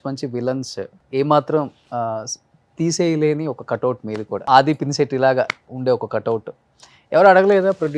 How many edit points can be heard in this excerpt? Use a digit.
3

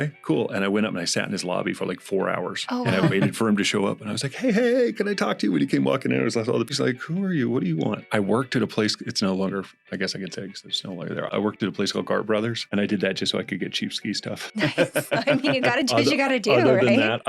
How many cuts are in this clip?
3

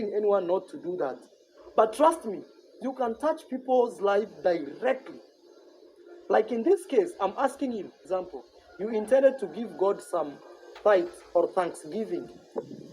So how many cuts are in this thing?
1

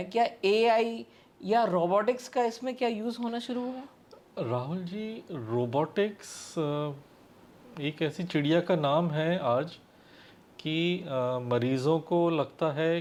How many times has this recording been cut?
0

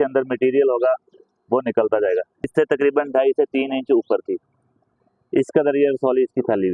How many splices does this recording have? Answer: 1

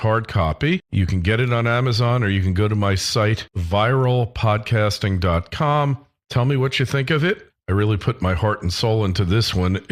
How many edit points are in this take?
0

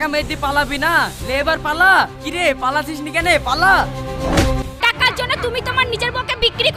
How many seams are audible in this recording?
1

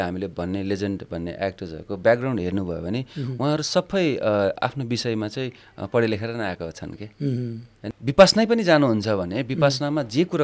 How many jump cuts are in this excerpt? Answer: 1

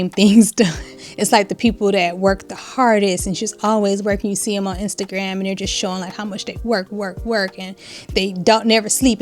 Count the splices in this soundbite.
1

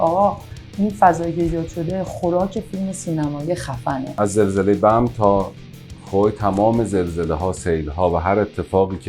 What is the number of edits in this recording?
1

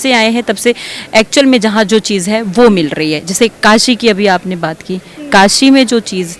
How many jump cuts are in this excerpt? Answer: 0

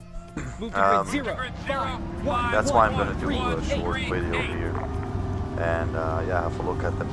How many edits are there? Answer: 1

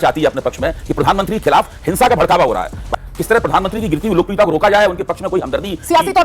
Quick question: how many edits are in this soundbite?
1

